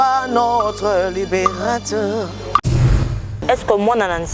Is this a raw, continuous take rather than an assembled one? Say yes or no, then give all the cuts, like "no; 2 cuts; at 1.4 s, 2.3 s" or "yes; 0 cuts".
no; 1 cut; at 3.1 s